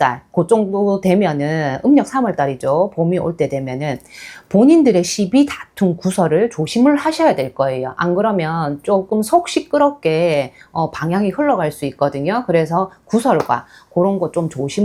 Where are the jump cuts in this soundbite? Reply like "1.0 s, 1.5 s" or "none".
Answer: none